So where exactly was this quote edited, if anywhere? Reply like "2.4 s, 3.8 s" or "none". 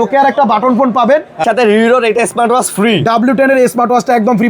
1.4 s